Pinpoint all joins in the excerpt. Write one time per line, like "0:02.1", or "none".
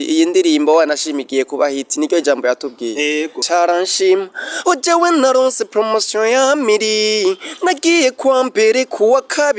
0:03.4